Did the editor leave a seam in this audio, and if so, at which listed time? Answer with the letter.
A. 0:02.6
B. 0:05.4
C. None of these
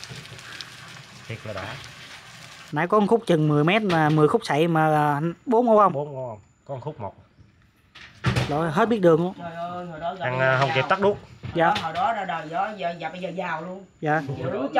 A